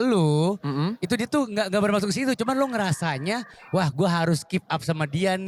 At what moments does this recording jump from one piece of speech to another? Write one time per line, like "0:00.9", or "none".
none

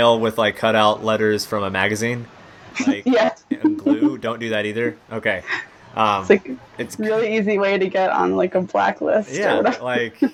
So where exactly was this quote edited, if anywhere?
none

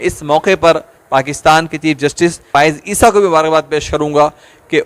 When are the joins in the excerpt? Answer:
0:02.5

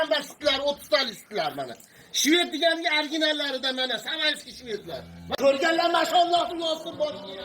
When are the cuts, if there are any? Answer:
0:05.3

